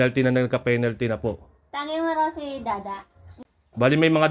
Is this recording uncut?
no; 1 cut; at 3.3 s

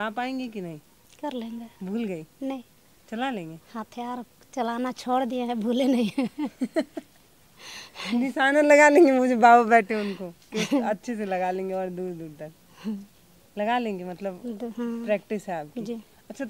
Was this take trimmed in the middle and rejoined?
no; 0 cuts

